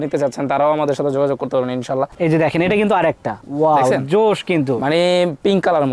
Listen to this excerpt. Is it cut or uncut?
cut